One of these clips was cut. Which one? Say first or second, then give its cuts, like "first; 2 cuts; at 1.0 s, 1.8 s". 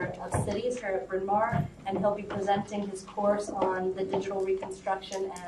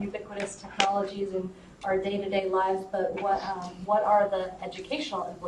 first; 1 cut; at 3.5 s